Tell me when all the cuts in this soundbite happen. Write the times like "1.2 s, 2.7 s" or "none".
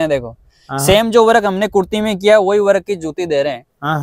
none